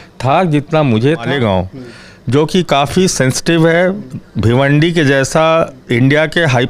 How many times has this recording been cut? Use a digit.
1